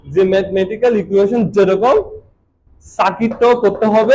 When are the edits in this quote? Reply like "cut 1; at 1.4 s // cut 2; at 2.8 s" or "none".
none